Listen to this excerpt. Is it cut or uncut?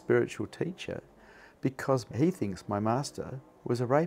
cut